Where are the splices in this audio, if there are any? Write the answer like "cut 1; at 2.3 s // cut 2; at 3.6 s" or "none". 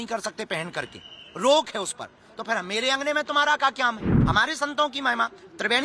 cut 1; at 4.1 s